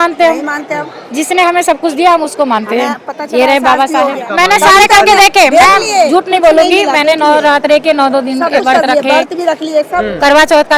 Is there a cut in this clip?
yes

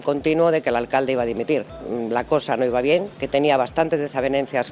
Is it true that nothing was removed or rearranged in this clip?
no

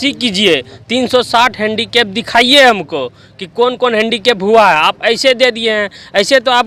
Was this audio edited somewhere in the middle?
no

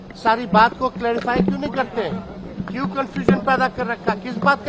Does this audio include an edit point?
no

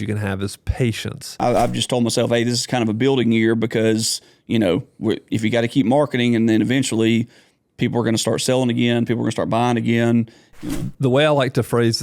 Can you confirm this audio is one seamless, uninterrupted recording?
no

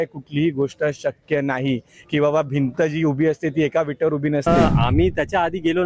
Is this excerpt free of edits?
no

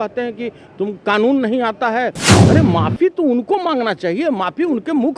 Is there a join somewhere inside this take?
yes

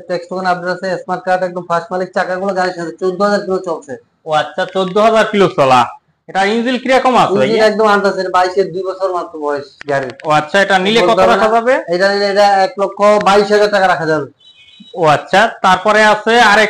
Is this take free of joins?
yes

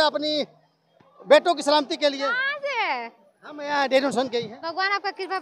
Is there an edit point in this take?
no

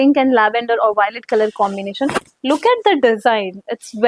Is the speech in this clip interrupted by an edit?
no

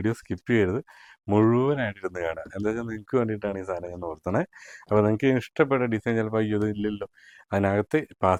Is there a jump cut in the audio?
no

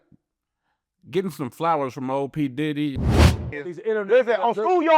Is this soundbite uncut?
no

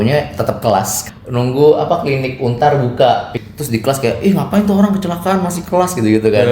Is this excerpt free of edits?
no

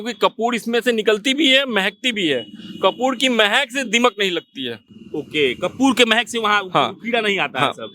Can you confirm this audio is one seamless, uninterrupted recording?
yes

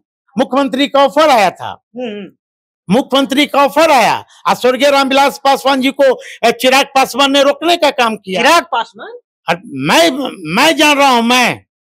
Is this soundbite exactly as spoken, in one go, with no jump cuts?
yes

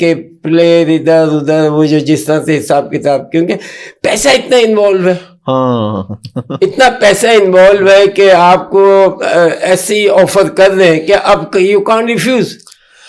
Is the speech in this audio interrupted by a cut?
no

